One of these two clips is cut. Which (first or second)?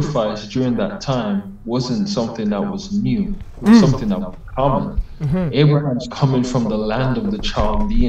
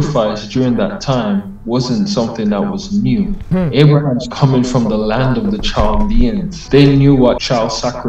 second